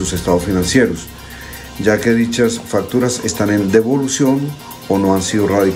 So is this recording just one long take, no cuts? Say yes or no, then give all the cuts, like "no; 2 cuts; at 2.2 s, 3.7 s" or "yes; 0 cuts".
yes; 0 cuts